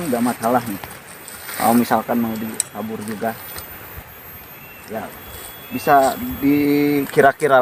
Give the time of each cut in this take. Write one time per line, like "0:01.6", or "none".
none